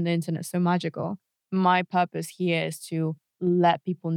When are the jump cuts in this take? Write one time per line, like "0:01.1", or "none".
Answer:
0:01.4
0:03.3